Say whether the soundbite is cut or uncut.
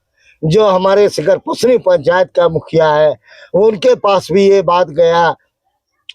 uncut